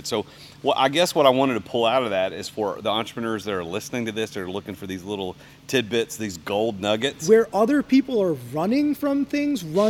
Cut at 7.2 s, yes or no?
yes